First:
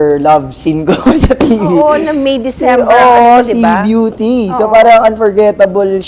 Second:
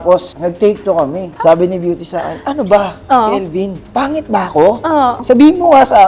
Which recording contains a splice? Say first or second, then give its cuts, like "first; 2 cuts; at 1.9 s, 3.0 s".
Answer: second; 2 cuts; at 1.3 s, 5.2 s